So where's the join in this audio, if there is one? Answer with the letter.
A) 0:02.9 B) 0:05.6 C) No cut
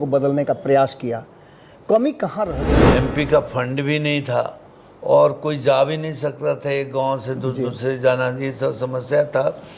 A